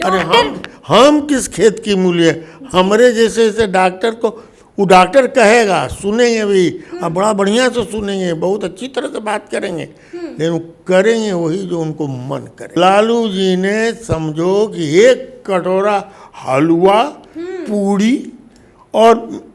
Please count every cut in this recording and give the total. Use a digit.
1